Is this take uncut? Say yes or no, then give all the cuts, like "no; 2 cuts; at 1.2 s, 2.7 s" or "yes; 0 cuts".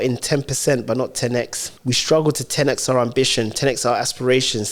no; 1 cut; at 1.6 s